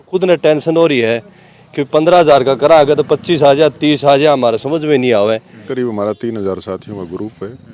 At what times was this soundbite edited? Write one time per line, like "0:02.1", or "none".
0:05.6